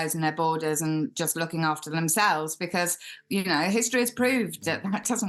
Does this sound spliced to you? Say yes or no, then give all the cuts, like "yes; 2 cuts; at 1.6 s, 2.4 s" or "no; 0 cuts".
no; 0 cuts